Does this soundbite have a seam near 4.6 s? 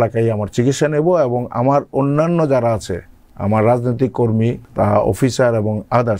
yes; 1 cut; at 4.6 s

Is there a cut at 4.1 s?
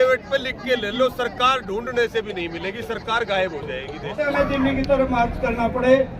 yes; 1 cut; at 4.1 s

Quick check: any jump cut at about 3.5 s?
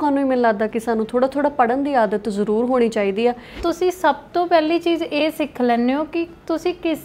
yes; 1 cut; at 3.5 s

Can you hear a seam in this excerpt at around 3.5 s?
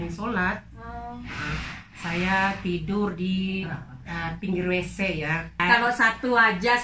no; 1 cut; at 5.5 s

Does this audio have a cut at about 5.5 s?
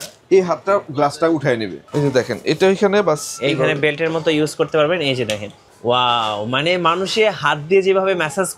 no; 1 cut; at 1.8 s

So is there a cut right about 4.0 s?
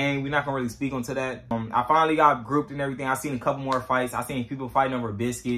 no; 1 cut; at 1.5 s

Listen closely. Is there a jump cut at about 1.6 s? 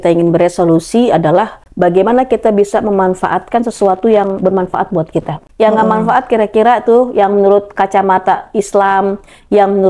yes; 2 cuts; at 1.6 s, 5.4 s

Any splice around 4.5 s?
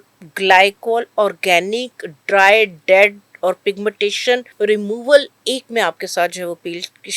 yes; 1 cut; at 4.5 s

